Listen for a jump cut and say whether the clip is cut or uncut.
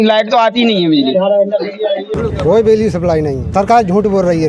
cut